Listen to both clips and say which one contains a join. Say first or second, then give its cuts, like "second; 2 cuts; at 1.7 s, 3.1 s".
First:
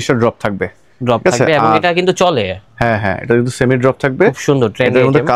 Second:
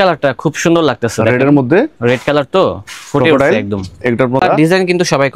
second; 1 cut; at 4.4 s